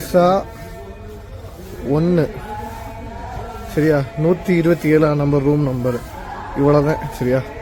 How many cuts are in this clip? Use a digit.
0